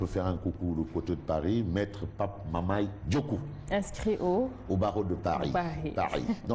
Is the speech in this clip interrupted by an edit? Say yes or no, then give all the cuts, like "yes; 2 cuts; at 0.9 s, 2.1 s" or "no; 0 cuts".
no; 0 cuts